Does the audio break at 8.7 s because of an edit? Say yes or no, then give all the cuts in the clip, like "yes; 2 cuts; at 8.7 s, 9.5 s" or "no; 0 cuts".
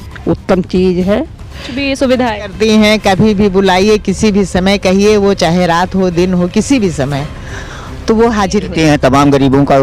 yes; 2 cuts; at 1.8 s, 8.7 s